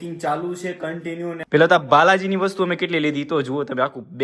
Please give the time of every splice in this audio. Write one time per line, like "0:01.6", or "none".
0:01.4